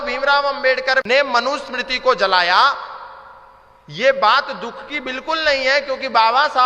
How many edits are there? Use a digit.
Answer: 1